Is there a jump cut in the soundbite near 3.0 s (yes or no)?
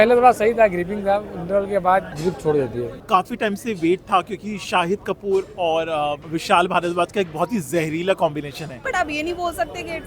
yes